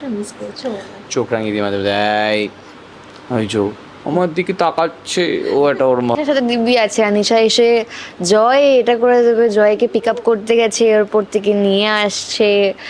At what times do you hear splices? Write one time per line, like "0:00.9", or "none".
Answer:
0:01.0
0:06.2